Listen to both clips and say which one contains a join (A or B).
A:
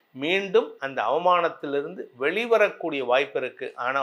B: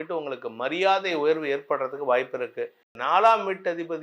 B